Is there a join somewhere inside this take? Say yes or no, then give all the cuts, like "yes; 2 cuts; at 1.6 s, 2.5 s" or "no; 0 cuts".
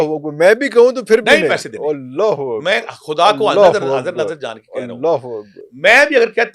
no; 0 cuts